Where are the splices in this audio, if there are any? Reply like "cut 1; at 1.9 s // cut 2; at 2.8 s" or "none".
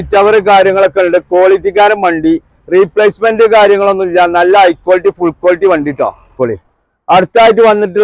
cut 1; at 6.3 s